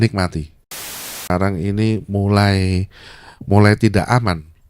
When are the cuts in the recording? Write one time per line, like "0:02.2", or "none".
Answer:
0:01.1

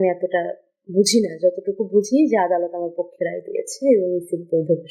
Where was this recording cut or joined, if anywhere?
none

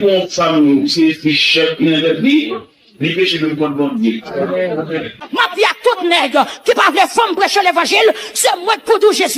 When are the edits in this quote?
0:05.2

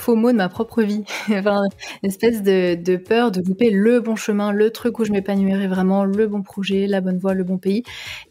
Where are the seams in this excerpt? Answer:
none

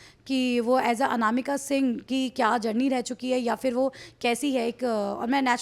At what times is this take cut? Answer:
none

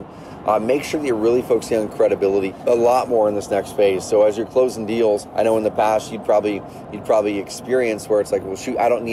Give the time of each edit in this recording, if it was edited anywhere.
0:02.5
0:05.3

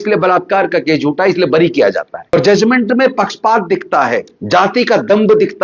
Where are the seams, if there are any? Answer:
0:02.3
0:04.3

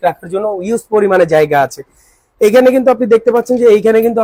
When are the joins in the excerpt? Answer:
none

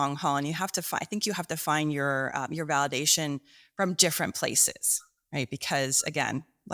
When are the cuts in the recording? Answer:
none

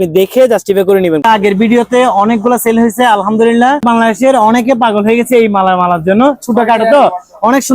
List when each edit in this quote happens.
0:01.2
0:03.8

